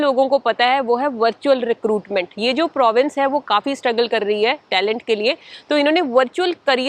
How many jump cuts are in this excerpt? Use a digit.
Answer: 0